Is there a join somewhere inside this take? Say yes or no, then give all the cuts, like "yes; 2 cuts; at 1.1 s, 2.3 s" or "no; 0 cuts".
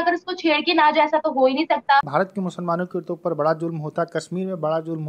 yes; 1 cut; at 2.1 s